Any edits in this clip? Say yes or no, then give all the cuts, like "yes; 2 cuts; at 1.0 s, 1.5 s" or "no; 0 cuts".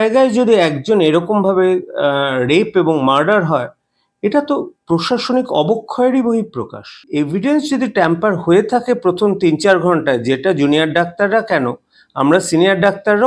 yes; 1 cut; at 7.0 s